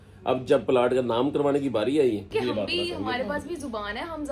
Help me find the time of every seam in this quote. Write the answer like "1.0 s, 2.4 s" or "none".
2.3 s